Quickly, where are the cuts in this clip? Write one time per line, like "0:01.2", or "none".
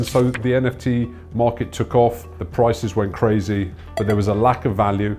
none